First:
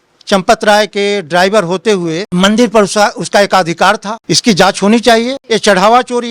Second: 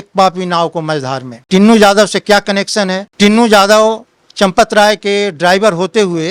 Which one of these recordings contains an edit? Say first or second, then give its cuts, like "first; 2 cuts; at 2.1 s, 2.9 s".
first; 2 cuts; at 4.2 s, 5.4 s